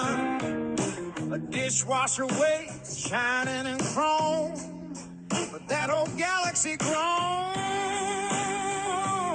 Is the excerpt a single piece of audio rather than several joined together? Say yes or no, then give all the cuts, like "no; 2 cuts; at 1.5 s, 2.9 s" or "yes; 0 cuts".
yes; 0 cuts